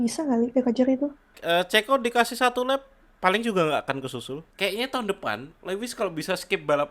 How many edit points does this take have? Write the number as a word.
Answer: two